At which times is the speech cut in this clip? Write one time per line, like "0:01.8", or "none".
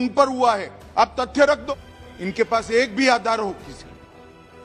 0:01.6